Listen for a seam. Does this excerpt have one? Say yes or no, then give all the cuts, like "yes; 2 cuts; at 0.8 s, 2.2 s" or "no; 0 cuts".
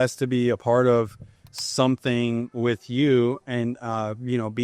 no; 0 cuts